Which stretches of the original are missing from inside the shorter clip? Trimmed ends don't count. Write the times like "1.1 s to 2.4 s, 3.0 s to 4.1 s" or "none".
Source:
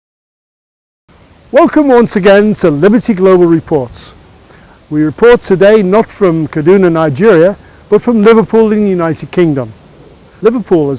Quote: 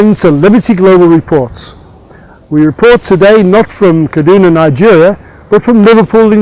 none

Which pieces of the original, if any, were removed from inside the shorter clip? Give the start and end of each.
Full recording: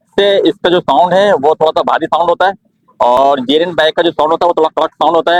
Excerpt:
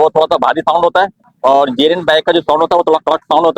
2.9 s to 3.2 s

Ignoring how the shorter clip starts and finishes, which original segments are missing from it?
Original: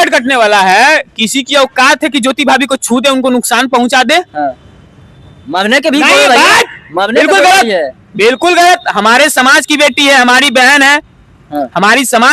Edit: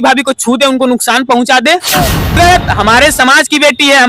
4.8 s to 8.5 s

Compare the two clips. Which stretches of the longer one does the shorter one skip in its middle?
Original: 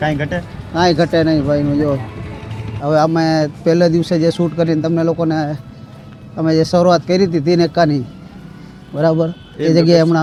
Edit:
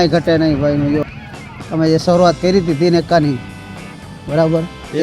2.0 s to 5.8 s

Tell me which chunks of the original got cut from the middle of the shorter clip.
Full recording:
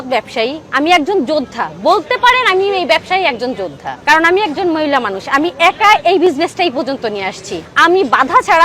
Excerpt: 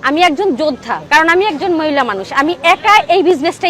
1.6 s to 3.9 s

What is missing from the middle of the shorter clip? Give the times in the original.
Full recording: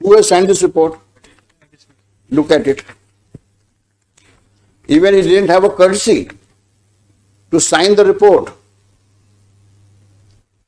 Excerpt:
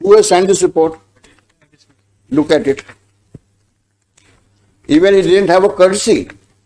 none

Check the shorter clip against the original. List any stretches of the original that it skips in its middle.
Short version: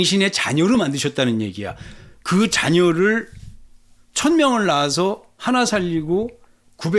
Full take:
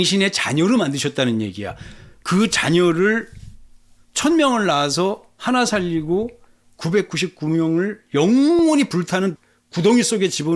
none

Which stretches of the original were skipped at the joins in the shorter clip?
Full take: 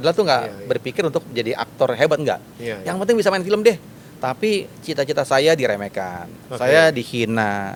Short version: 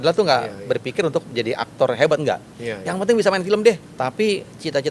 3.9 s to 4.2 s

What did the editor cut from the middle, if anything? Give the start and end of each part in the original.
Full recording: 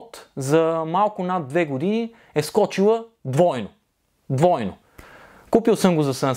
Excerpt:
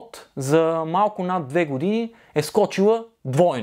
none

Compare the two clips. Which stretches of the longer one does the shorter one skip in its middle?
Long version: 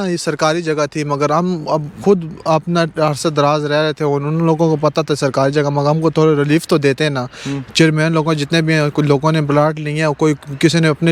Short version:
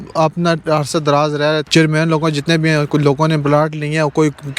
3.9 s to 7.7 s

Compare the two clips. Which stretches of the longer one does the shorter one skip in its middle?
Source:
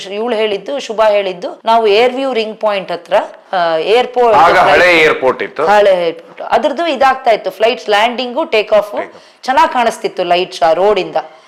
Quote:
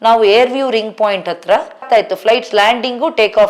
3.5 s to 7.2 s

